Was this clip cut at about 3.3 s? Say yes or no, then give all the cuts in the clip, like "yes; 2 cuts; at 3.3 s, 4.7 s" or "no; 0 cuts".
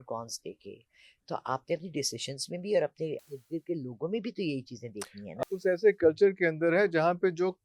yes; 2 cuts; at 3.3 s, 5.5 s